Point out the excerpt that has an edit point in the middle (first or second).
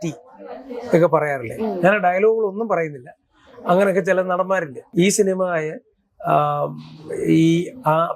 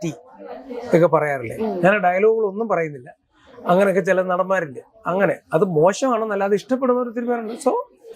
first